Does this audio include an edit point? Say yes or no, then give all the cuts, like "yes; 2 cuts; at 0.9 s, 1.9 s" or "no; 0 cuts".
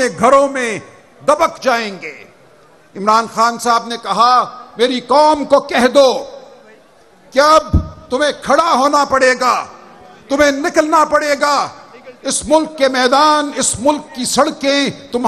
no; 0 cuts